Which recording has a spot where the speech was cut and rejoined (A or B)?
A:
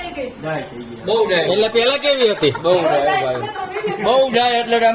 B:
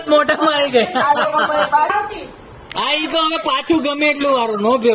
B